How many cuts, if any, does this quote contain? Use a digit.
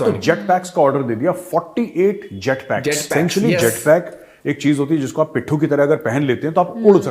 1